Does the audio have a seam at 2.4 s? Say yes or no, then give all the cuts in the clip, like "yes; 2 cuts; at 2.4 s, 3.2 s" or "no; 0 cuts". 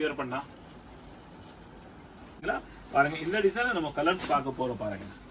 yes; 1 cut; at 2.4 s